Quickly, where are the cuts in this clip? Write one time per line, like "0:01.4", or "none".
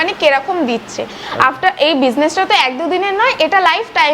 none